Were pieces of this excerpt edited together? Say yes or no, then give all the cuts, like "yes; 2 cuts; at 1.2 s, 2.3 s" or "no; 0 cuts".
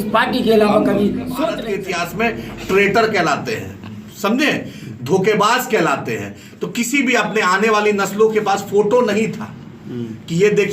yes; 1 cut; at 1.6 s